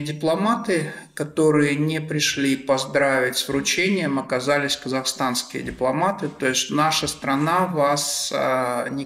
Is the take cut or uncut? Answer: uncut